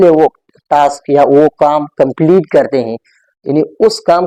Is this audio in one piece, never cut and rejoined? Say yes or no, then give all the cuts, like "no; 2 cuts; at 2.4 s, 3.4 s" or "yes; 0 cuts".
yes; 0 cuts